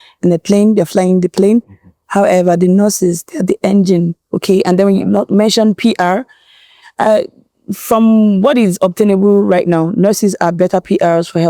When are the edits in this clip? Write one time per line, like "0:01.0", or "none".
none